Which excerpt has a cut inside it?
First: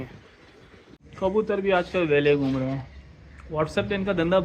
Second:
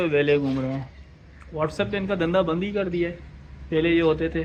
first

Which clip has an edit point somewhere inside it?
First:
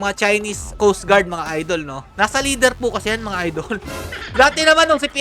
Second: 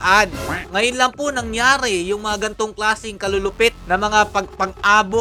first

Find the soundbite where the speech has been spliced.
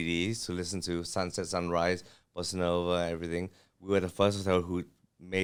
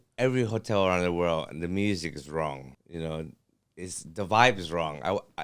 second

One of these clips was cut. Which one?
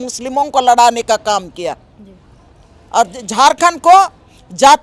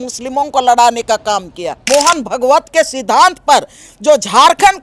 second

